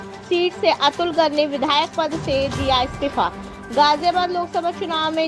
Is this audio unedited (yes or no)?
yes